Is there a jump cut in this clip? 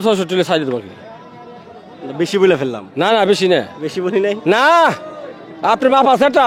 no; 0 cuts

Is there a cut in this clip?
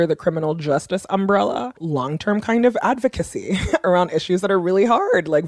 yes; 2 cuts; at 1.8 s, 3.8 s

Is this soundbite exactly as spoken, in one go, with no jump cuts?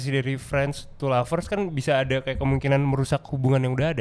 yes; 0 cuts

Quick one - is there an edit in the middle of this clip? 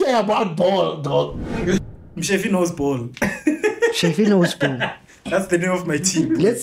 yes; 1 cut; at 1.8 s

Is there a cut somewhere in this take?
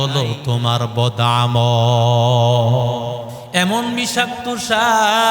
yes; 1 cut; at 3.4 s

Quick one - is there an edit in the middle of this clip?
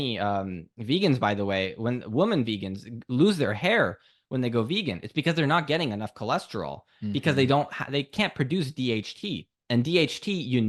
no; 0 cuts

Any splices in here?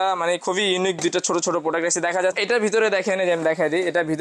yes; 1 cut; at 2.4 s

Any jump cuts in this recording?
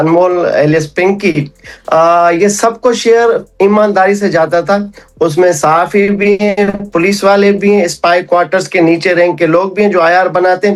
no; 0 cuts

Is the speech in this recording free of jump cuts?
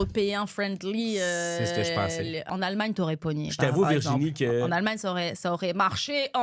no; 1 cut; at 2.5 s

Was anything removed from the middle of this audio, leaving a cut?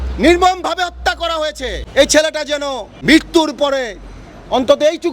yes; 2 cuts; at 1.7 s, 2.8 s

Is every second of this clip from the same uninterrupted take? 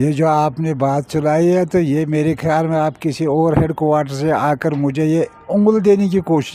yes; 0 cuts

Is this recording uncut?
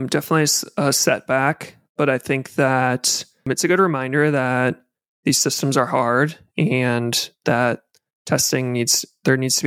no; 1 cut; at 3.4 s

